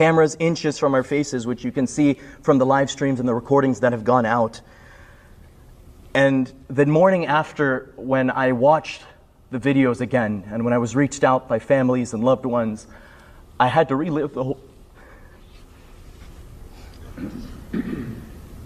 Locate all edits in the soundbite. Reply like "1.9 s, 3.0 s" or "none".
none